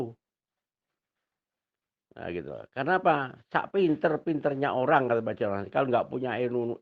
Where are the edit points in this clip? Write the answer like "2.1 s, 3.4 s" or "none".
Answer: none